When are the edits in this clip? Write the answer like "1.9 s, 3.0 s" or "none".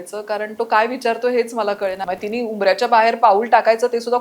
2.0 s